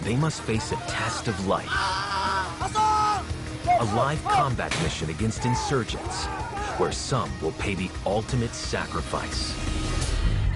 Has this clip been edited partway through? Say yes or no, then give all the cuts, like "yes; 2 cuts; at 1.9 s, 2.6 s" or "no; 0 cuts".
no; 0 cuts